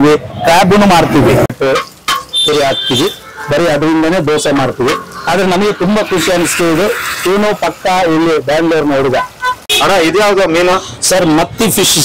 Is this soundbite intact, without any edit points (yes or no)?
no